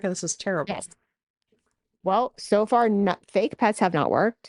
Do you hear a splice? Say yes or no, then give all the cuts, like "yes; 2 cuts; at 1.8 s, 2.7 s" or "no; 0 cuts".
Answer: no; 0 cuts